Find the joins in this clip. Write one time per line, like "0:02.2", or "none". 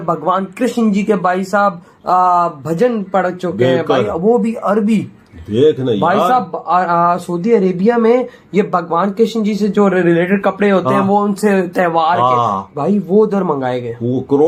none